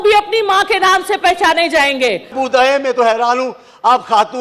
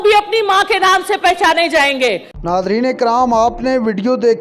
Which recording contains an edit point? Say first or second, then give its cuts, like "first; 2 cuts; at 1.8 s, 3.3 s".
first; 1 cut; at 2.3 s